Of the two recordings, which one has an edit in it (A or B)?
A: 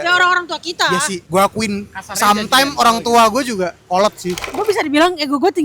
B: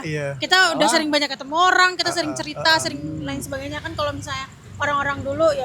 A